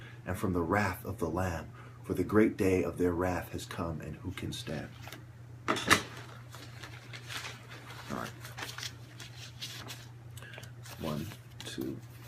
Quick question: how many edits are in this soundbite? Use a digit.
1